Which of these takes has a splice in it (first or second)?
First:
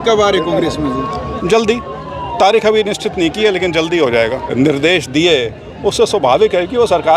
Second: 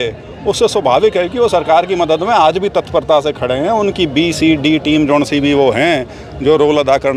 first